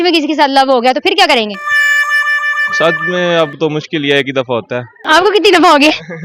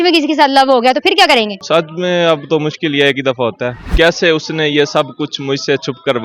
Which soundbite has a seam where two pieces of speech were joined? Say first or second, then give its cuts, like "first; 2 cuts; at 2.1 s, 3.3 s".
second; 2 cuts; at 1.6 s, 3.8 s